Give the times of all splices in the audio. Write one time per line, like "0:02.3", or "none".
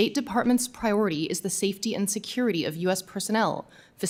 none

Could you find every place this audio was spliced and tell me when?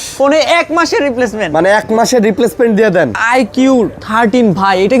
0:03.2

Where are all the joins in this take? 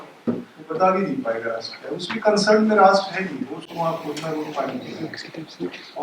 none

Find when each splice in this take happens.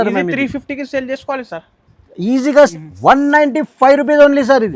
0:02.5

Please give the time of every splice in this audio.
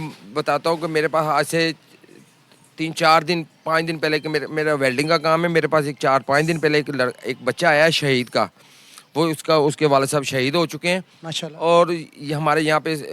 0:01.7

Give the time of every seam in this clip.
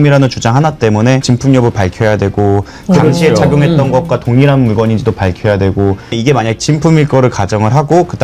0:01.2
0:06.1

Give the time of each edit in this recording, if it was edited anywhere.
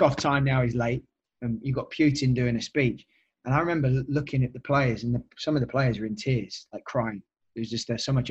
none

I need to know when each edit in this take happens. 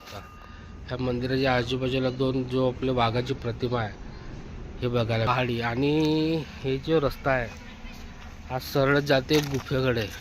0:05.3

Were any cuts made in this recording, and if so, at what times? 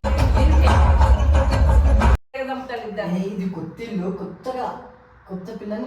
0:02.4

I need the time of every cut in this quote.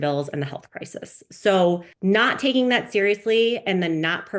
0:01.9

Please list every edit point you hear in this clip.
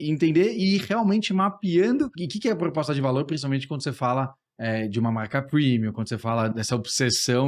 0:02.2
0:06.5

